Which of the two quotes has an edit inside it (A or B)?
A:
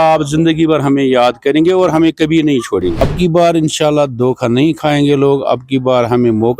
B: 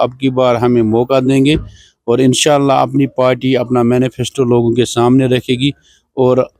A